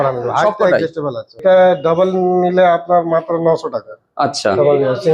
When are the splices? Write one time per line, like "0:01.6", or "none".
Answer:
0:01.4